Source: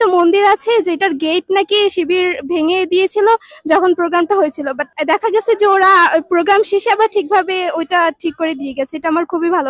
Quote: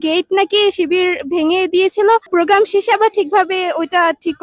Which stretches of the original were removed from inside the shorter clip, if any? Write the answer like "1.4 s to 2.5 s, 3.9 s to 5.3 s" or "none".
3.5 s to 6.3 s